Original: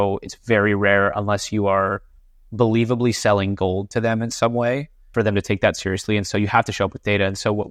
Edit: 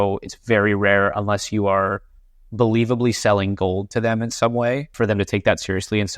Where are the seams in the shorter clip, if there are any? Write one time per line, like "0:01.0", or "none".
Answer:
0:04.9